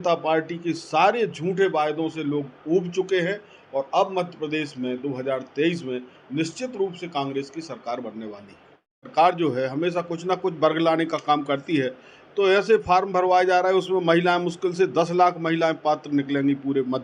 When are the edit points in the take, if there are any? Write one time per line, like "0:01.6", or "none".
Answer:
0:09.0